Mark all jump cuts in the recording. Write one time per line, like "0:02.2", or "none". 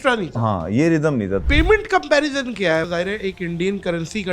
0:01.4
0:02.9